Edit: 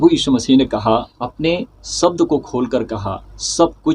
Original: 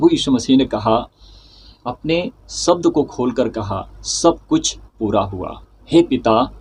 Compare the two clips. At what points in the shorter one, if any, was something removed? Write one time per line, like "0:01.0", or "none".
0:01.2